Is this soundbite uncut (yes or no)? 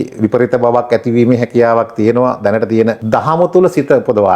no